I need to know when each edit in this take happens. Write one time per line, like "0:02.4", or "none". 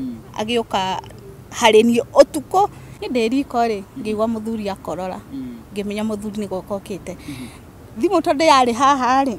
0:02.9